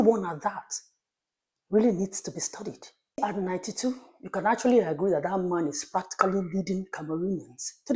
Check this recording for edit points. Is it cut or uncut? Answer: cut